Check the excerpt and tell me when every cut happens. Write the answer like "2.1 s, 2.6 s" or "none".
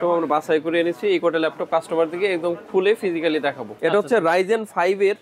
3.7 s